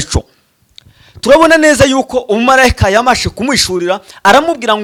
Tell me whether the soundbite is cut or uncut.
uncut